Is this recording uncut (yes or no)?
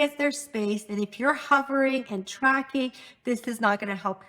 yes